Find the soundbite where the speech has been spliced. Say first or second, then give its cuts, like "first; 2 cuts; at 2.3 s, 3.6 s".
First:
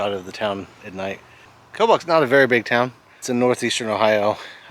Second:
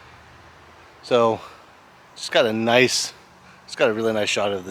first; 2 cuts; at 1.6 s, 3.2 s